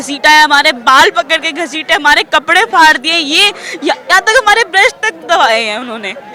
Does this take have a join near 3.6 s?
no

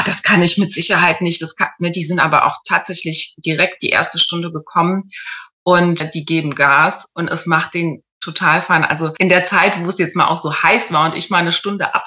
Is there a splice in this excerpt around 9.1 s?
yes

